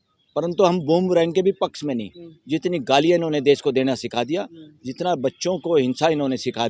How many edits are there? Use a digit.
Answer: 0